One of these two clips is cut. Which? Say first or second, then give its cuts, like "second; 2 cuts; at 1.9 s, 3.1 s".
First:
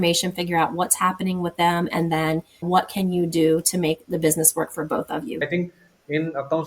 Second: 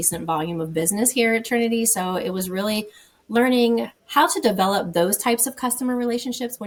first; 1 cut; at 5.4 s